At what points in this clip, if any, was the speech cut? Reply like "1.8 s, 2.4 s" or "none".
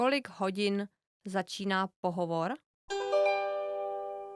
2.7 s